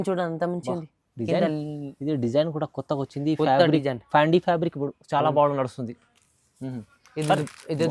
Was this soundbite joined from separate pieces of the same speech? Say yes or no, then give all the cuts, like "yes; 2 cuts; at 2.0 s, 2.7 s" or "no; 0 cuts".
no; 0 cuts